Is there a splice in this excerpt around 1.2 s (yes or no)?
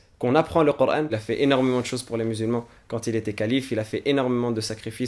yes